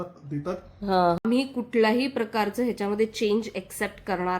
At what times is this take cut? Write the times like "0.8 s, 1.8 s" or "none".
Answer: 1.2 s